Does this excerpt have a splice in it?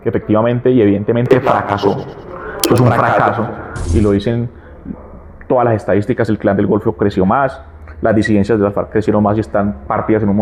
no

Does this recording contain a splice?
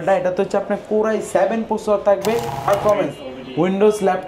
yes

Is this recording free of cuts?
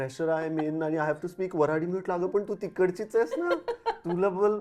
yes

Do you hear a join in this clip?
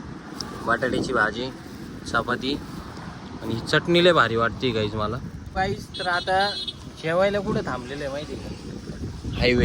yes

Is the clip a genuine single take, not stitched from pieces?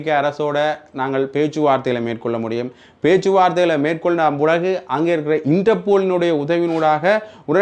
yes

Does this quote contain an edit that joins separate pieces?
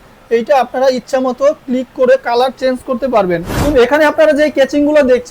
yes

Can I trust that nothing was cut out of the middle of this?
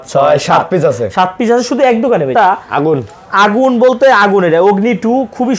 no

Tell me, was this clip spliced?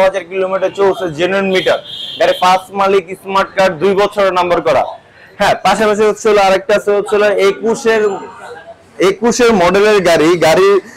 no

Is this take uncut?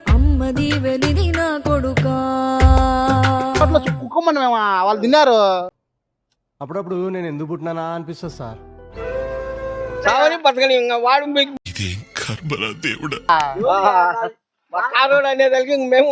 no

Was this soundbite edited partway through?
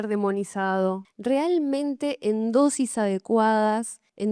no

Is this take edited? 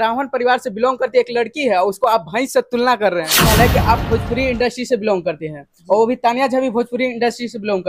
yes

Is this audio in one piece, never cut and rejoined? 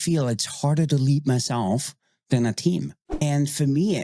no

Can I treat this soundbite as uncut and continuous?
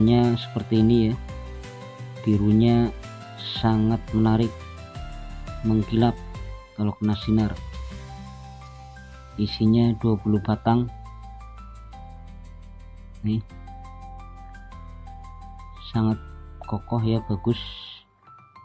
no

